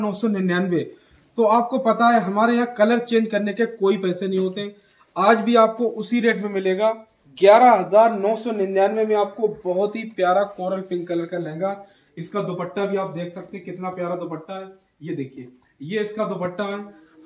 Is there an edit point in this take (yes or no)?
no